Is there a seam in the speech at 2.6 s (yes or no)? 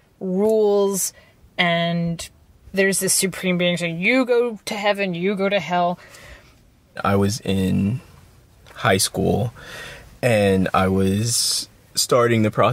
yes